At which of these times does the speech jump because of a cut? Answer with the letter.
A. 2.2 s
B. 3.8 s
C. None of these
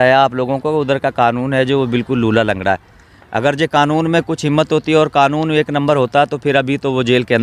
C